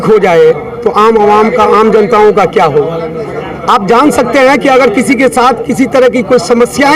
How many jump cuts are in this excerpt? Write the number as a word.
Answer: zero